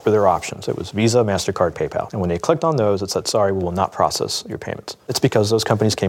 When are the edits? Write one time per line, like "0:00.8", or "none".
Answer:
0:02.1
0:05.1